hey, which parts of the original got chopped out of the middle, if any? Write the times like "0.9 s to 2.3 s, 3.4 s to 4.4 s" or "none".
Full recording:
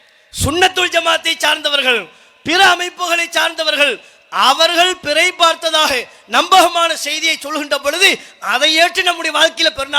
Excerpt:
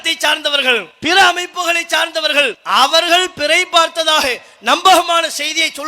2.1 s to 2.3 s, 4.0 s to 4.2 s